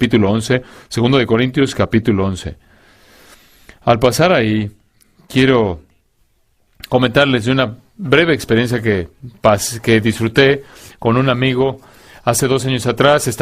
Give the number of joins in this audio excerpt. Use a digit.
1